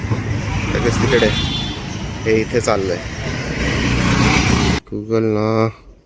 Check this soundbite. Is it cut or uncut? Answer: cut